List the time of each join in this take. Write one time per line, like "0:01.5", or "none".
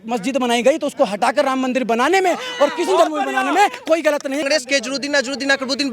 0:04.4

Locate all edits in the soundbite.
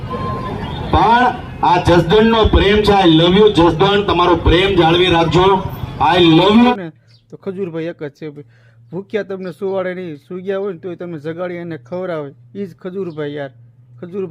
0:06.7

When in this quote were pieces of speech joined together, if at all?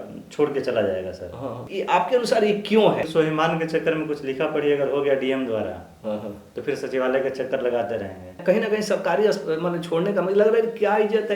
0:01.7
0:03.1
0:08.4

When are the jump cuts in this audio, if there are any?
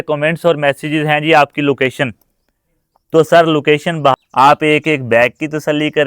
0:04.1

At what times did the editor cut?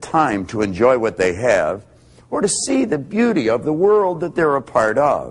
none

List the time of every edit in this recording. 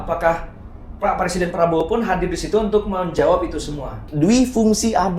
0:04.1

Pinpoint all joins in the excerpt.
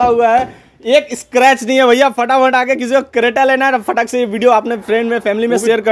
none

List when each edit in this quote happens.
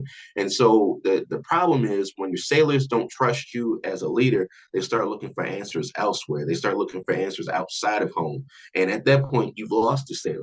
none

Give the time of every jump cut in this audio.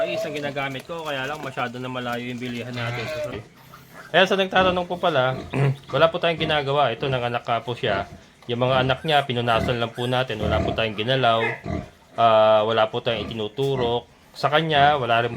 0:03.4

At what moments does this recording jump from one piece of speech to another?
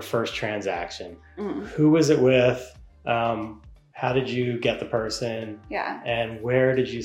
none

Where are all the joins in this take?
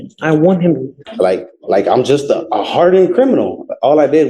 0:01.0

